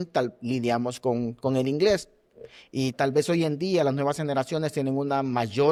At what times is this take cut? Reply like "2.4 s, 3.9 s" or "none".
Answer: none

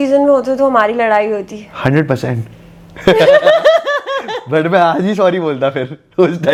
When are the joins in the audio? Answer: none

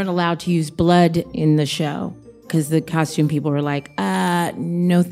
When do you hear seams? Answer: 1.3 s, 2.5 s

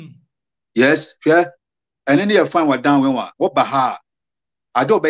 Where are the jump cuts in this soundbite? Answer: none

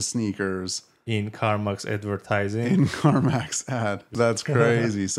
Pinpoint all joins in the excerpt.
4.0 s

